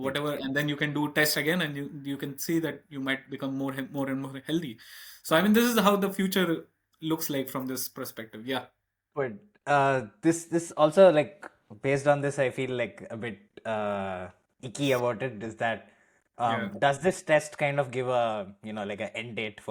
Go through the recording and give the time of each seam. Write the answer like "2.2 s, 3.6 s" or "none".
none